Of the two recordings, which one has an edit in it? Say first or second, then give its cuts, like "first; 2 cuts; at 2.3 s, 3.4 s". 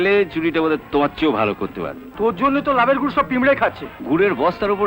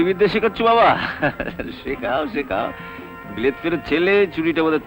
first; 1 cut; at 2.0 s